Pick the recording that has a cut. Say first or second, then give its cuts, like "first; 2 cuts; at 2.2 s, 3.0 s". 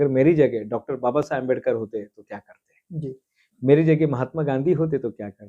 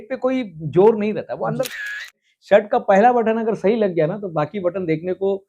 second; 1 cut; at 1.9 s